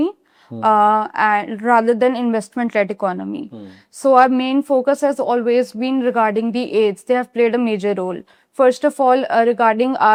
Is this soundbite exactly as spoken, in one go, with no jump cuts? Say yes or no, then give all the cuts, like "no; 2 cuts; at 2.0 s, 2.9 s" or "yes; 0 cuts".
yes; 0 cuts